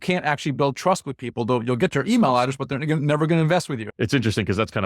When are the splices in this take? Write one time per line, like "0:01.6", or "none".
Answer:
0:03.8